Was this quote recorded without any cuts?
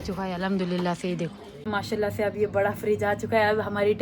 no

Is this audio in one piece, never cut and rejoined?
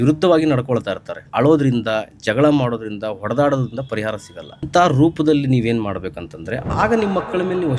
no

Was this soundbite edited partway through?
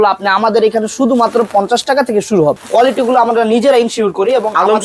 yes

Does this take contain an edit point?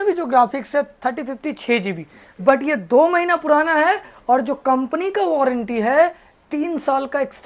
no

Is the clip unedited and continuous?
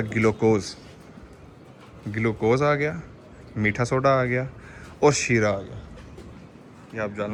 yes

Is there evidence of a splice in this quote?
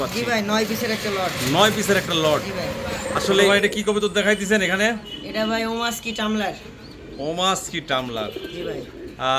yes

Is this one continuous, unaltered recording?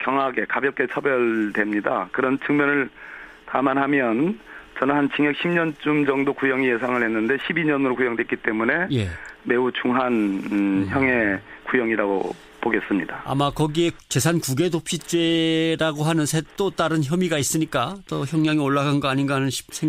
no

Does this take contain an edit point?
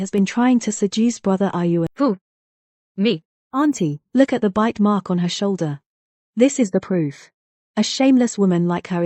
yes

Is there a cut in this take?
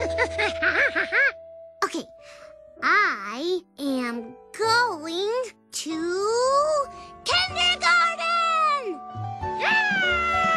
no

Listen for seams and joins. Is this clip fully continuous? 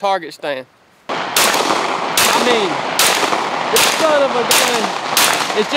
no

